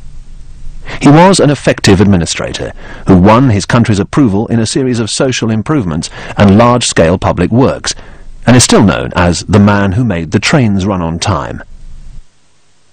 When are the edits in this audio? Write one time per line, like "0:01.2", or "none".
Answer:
0:04.1